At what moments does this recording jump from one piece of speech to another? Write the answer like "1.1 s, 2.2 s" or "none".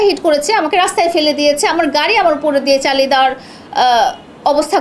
none